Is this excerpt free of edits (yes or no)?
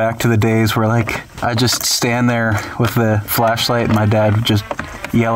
no